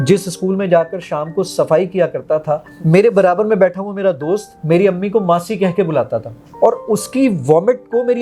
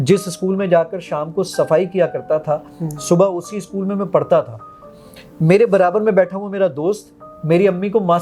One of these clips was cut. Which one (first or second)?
first